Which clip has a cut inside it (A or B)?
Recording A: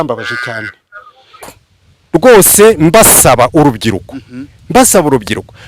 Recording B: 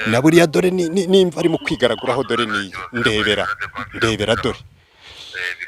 A